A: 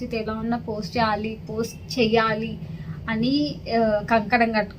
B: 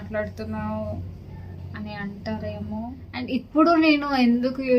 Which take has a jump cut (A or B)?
B